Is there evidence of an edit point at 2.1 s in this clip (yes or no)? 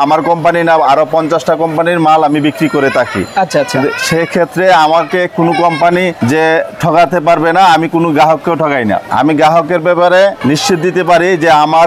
no